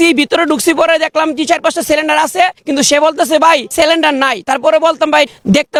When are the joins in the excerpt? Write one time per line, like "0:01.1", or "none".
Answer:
none